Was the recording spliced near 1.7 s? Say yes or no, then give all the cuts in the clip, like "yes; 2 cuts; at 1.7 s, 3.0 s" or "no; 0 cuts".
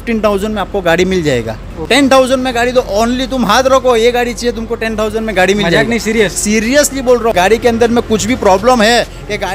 yes; 2 cuts; at 1.7 s, 7.3 s